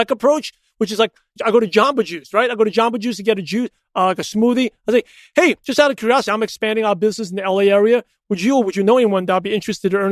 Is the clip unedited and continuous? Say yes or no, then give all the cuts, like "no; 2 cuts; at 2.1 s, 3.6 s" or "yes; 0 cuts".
no; 2 cuts; at 1.3 s, 8.3 s